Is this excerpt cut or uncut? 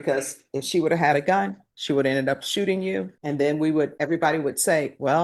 cut